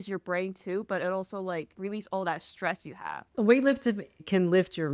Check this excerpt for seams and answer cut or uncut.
uncut